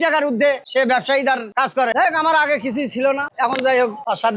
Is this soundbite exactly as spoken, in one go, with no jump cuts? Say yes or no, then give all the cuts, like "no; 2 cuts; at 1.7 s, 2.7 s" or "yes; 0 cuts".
no; 1 cut; at 1.9 s